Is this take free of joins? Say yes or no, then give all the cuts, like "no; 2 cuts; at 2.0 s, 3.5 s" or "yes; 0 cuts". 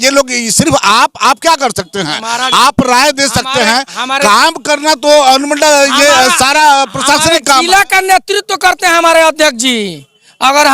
yes; 0 cuts